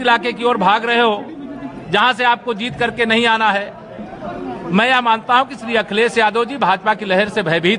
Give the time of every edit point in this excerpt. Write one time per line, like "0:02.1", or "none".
none